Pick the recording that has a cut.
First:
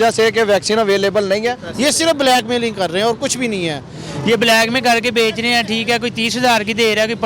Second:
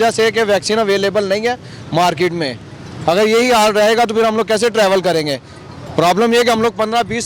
first; 2 cuts; at 1.7 s, 3.9 s

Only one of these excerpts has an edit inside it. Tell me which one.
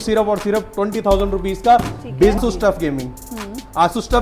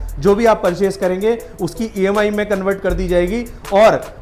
first; 1 cut; at 2.4 s

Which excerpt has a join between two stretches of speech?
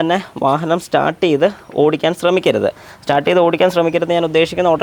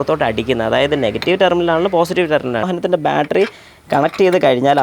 second; 1 cut; at 2.7 s

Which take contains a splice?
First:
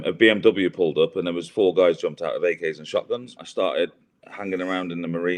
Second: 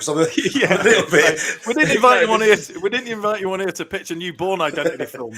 first; 1 cut; at 3.4 s

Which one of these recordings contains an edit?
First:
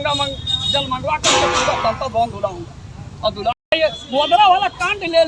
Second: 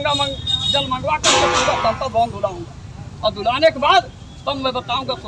first; 1 cut; at 3.6 s

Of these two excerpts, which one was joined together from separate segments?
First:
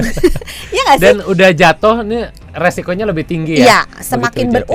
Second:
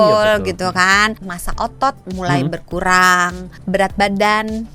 second; 2 cuts; at 1.3 s, 3.5 s

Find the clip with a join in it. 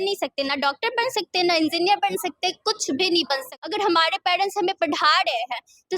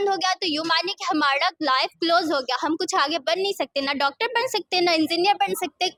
first; 1 cut; at 3.5 s

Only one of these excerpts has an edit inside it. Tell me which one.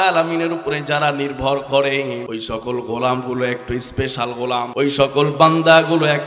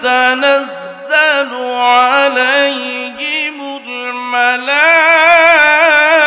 first; 2 cuts; at 2.2 s, 4.7 s

